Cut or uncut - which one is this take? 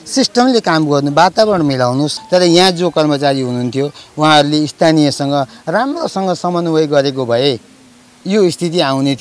cut